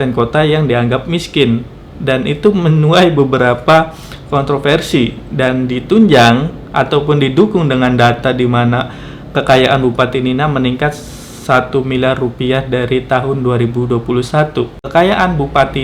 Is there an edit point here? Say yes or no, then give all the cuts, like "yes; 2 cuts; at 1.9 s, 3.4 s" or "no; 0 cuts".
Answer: yes; 1 cut; at 14.8 s